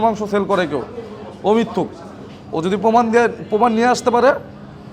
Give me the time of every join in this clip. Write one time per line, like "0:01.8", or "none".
none